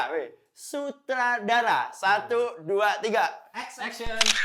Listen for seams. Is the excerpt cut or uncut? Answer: uncut